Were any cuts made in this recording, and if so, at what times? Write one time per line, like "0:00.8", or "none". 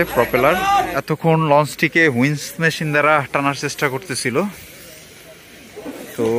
0:01.0